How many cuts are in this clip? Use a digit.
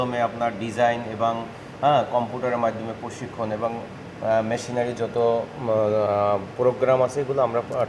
0